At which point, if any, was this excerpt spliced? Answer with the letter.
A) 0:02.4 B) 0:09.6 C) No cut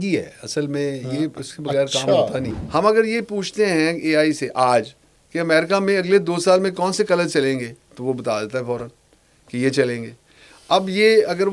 A